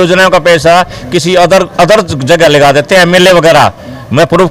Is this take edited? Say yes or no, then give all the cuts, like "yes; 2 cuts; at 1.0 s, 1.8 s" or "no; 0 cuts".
no; 0 cuts